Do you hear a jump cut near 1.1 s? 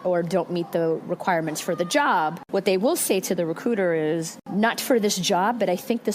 no; 2 cuts; at 2.4 s, 4.4 s

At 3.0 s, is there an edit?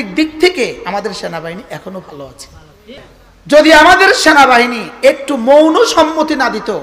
yes; 1 cut; at 3.0 s

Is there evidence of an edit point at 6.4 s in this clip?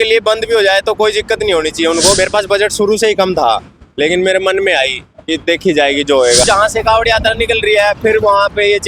yes; 2 cuts; at 2.2 s, 6.4 s

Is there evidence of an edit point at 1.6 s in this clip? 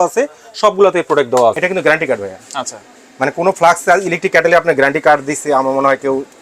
yes; 1 cut; at 1.6 s

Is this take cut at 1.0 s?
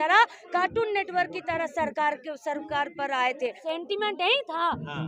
no; 1 cut; at 3.6 s

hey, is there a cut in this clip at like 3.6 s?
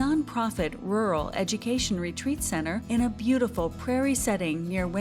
no; 0 cuts

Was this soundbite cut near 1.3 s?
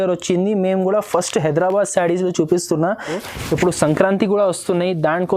no; 1 cut; at 3.2 s

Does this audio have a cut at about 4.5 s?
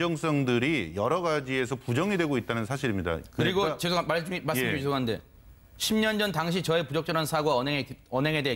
no; 1 cut; at 6.2 s

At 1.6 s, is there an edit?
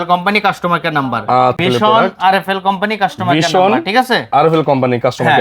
yes; 1 cut; at 1.6 s

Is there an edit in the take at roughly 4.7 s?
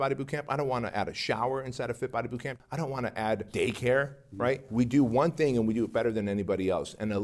yes; 3 cuts; at 2.6 s, 3.5 s, 4.7 s

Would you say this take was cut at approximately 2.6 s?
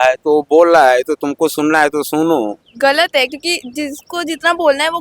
yes; 1 cut; at 2.6 s

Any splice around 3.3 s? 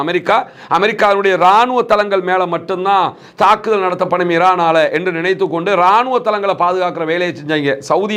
no; 0 cuts

